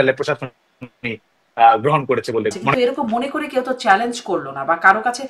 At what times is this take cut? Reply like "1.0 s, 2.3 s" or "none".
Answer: 2.7 s